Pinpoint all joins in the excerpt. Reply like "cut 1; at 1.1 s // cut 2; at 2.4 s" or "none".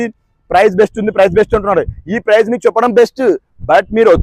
none